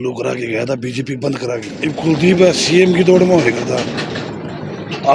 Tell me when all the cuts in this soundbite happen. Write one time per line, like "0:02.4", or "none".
0:01.7